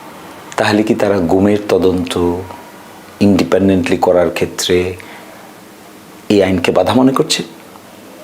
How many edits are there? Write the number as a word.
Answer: zero